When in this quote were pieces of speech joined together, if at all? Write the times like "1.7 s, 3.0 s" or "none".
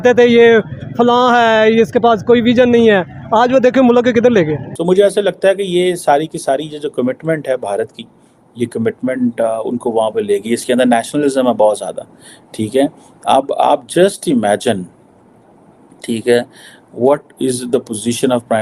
none

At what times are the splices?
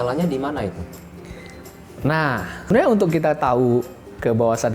2.7 s

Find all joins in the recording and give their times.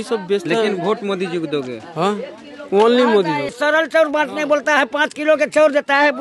3.5 s

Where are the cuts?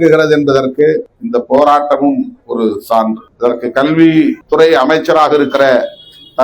1.1 s, 3.3 s, 4.4 s

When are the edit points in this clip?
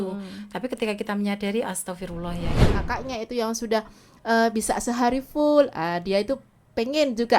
2.7 s

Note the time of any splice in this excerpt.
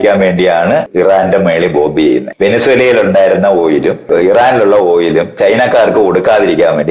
0.9 s, 2.3 s, 4.1 s

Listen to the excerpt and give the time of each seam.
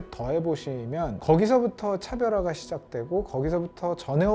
1.2 s

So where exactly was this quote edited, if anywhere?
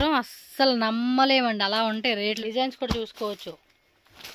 2.4 s

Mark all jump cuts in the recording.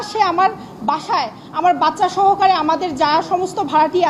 none

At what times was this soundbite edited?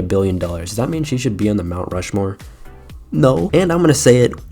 3.5 s

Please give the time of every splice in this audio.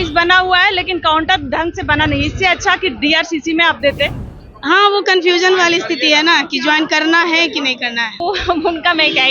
4.2 s, 8.2 s

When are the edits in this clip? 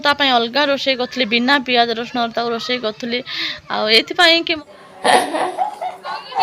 4.6 s

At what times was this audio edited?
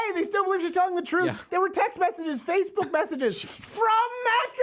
1.5 s

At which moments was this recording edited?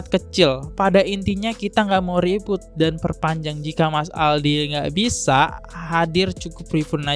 none

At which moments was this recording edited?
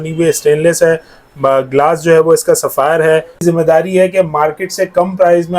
3.3 s

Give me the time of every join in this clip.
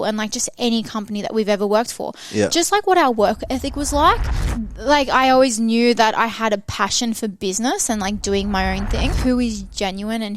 4.4 s, 9.2 s

